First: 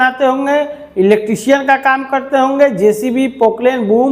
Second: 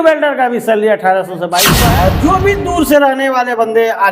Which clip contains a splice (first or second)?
second